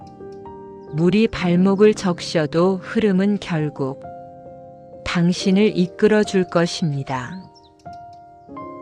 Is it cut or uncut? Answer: cut